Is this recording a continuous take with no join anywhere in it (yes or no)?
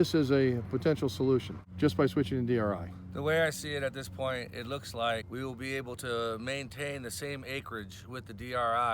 no